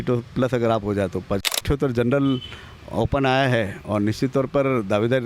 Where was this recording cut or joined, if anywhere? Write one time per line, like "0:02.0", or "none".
0:01.5